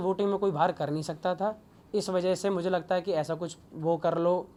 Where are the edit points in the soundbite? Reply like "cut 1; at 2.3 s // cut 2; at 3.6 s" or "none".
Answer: none